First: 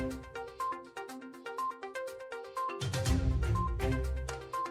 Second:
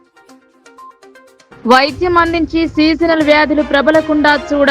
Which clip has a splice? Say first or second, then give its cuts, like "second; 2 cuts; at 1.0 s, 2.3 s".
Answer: second; 1 cut; at 1.0 s